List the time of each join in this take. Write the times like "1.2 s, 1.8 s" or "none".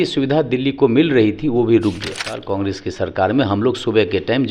2.3 s